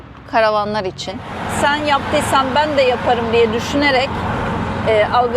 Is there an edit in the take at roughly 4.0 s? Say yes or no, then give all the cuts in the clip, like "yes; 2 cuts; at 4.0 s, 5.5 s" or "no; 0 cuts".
no; 1 cut; at 1.4 s